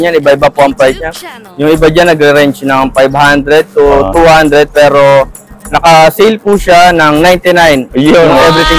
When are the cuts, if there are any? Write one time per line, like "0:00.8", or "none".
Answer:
none